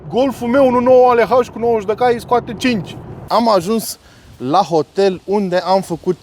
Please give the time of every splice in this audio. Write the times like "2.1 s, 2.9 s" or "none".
3.2 s